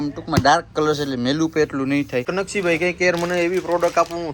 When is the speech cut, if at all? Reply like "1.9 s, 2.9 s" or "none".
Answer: 2.3 s